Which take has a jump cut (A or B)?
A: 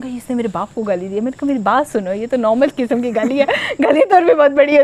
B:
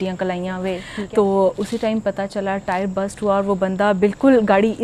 B